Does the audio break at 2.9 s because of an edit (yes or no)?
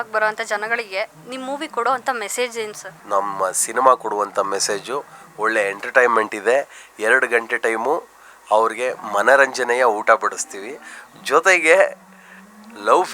yes